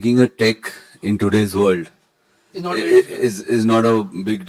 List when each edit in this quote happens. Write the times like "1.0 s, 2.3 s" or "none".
none